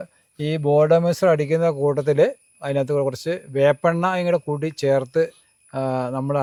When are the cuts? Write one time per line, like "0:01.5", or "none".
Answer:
none